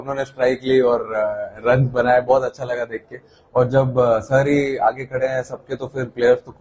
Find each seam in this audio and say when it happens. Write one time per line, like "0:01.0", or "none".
none